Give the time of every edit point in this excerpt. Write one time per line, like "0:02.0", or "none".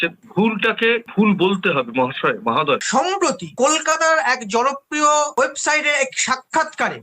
0:02.8